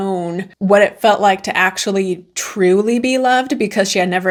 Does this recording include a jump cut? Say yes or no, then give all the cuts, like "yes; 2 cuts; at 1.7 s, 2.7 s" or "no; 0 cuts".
no; 0 cuts